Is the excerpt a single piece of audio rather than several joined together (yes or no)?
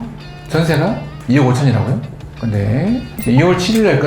no